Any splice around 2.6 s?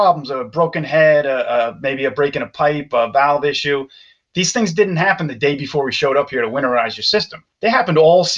no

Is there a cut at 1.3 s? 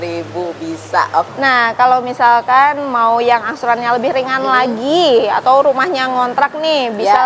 yes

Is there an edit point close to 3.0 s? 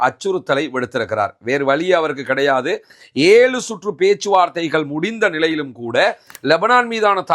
yes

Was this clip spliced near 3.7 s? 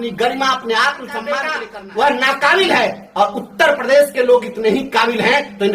no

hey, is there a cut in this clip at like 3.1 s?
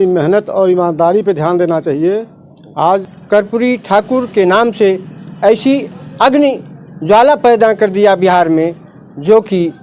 yes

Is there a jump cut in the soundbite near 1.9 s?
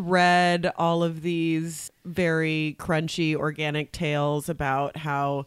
yes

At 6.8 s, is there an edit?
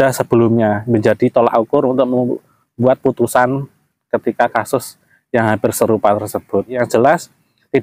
yes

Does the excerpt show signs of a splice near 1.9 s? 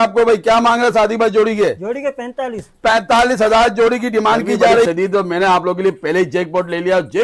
no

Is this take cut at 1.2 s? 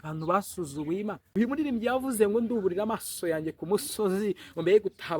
yes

